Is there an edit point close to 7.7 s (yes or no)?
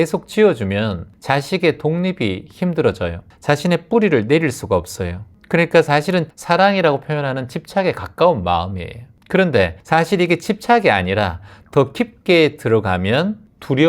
no